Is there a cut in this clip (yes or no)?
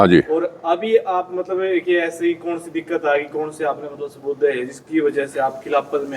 no